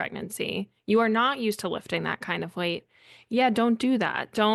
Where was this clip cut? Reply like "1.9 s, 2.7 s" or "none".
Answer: none